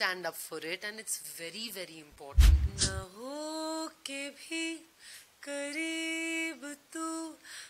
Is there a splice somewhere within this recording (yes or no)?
yes